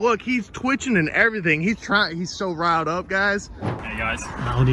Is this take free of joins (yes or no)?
no